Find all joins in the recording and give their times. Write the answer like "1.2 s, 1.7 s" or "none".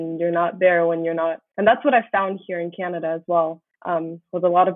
1.4 s, 3.7 s